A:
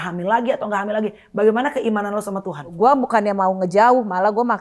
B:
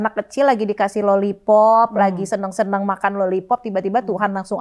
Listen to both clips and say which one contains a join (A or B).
A